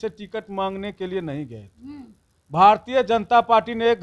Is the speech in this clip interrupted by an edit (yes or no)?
no